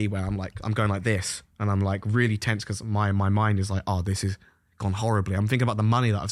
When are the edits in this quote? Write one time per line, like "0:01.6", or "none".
none